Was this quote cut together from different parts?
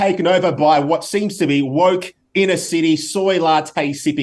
no; 0 cuts

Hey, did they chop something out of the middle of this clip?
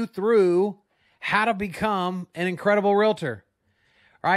no; 0 cuts

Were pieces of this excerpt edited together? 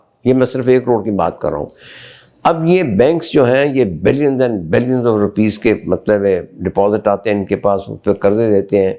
no; 0 cuts

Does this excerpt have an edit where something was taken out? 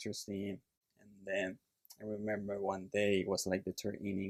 no; 0 cuts

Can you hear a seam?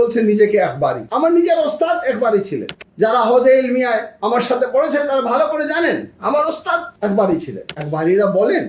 yes; 3 cuts; at 1.0 s, 2.7 s, 7.6 s

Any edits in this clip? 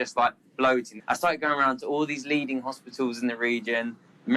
yes; 1 cut; at 0.9 s

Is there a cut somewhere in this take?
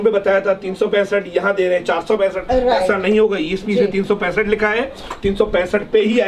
no; 0 cuts

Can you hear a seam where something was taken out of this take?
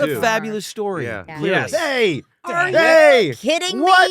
yes; 1 cut; at 1.2 s

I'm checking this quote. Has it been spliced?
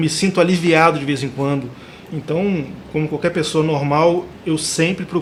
no; 0 cuts

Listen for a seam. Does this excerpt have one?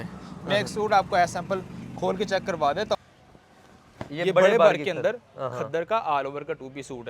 yes; 1 cut; at 3.0 s

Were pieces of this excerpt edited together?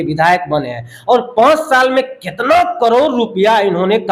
no; 0 cuts

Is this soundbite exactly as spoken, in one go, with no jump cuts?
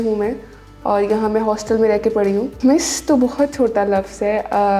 no; 1 cut; at 2.5 s

